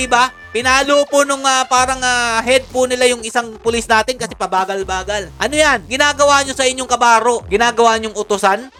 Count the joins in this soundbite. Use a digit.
0